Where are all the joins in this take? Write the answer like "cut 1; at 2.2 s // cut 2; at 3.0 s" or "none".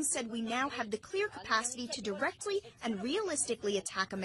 cut 1; at 1.7 s